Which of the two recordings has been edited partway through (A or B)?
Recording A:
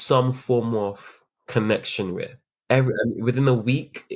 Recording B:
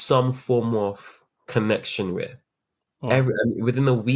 A